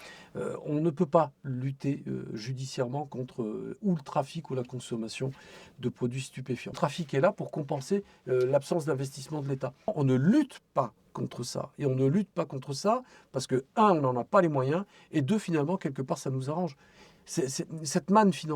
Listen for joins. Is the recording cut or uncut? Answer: cut